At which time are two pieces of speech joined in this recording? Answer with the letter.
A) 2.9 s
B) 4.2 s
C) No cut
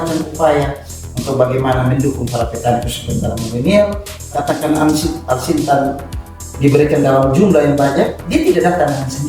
B